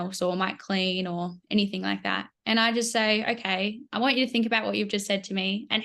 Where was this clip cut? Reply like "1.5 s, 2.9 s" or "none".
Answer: none